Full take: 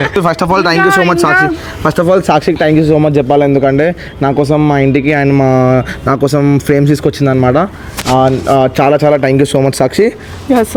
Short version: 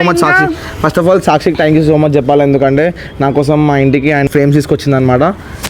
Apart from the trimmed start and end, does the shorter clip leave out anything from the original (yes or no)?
yes